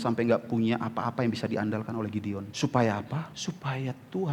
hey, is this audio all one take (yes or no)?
no